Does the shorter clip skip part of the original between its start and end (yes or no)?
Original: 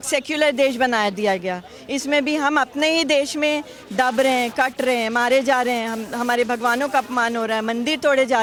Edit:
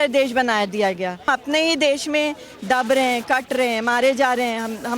yes